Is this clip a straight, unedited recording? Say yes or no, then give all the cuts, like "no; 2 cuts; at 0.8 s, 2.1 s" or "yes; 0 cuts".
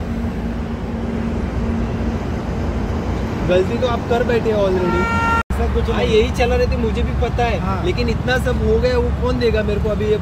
no; 1 cut; at 5.5 s